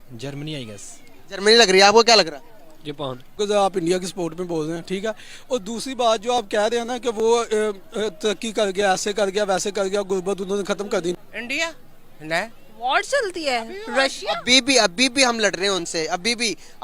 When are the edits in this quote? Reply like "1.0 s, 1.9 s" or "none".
3.3 s, 11.1 s